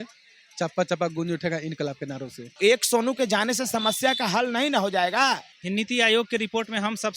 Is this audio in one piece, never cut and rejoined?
no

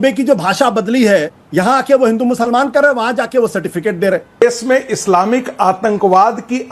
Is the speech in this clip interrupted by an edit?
yes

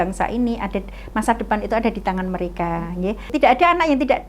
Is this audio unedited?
no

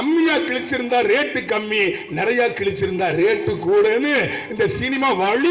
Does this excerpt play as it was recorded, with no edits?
yes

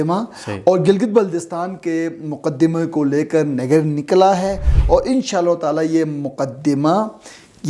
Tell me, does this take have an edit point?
no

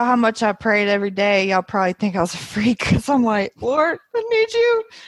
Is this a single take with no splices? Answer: yes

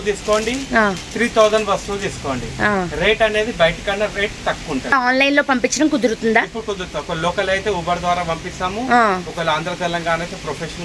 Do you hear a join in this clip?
yes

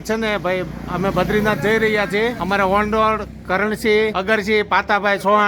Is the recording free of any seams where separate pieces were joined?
no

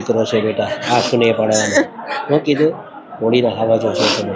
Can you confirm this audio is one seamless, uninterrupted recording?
yes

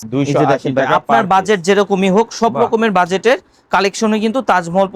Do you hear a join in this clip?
no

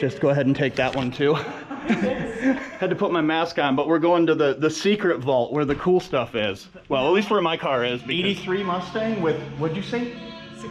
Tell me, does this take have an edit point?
yes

